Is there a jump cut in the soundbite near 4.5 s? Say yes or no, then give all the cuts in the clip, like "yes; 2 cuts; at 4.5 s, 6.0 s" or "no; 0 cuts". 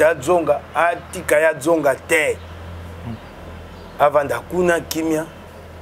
no; 0 cuts